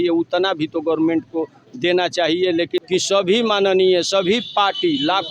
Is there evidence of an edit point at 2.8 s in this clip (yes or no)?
yes